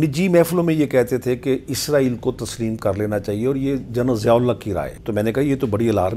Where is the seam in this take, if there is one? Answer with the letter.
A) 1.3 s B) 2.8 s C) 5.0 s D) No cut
C